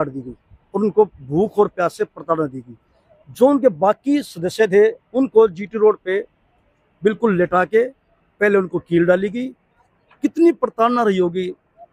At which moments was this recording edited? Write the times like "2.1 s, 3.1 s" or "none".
none